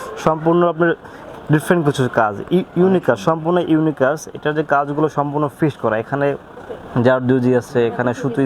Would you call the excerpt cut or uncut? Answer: uncut